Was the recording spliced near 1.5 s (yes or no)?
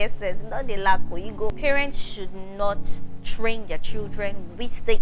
yes